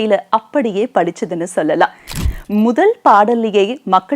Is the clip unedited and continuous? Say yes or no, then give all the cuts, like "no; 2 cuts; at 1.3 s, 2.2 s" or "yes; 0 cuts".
no; 1 cut; at 2.2 s